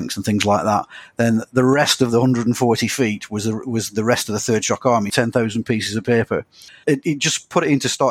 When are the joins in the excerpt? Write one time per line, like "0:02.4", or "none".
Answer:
0:05.1
0:06.8